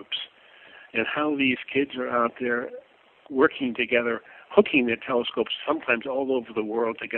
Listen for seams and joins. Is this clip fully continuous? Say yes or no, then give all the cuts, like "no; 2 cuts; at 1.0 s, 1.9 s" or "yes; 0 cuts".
yes; 0 cuts